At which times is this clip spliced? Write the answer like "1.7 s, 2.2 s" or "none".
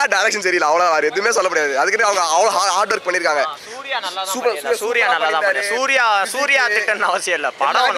none